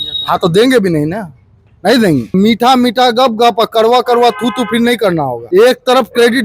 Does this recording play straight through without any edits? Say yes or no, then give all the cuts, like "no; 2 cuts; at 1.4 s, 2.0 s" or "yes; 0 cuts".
no; 2 cuts; at 2.3 s, 5.4 s